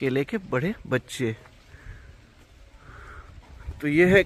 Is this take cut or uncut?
uncut